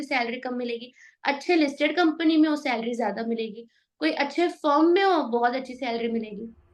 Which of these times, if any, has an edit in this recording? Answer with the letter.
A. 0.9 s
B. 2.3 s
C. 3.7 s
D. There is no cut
D